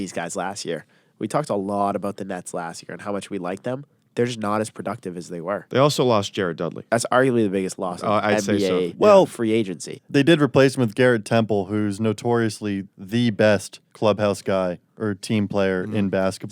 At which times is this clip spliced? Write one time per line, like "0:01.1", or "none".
0:06.8
0:09.9